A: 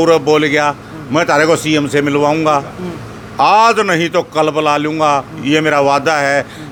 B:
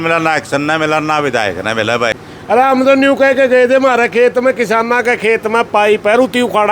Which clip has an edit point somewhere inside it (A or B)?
B